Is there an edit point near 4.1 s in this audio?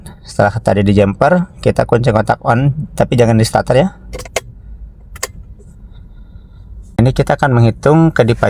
no; 1 cut; at 7.0 s

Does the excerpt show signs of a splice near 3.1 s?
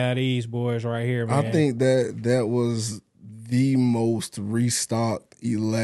no; 0 cuts

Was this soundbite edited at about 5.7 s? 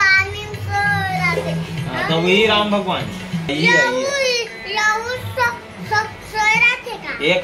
no; 1 cut; at 3.5 s

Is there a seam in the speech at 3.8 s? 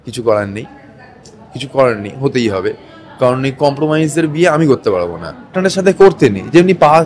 no; 1 cut; at 5.6 s

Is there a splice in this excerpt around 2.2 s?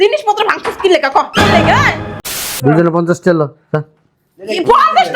yes; 1 cut; at 2.2 s

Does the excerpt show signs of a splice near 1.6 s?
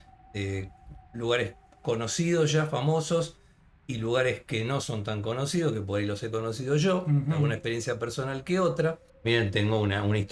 no; 1 cut; at 9.1 s

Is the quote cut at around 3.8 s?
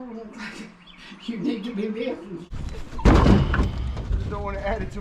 no; 1 cut; at 2.5 s

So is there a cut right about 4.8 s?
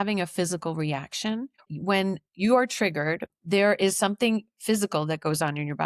no; 2 cuts; at 1.7 s, 3.3 s

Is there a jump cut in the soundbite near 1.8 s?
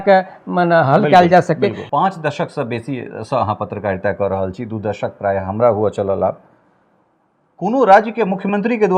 yes; 1 cut; at 1.8 s

